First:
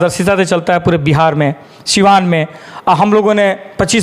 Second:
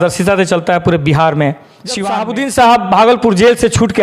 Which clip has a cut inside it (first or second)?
second